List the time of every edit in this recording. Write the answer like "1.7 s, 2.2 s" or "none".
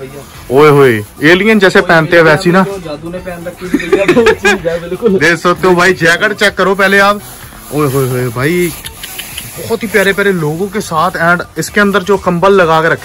none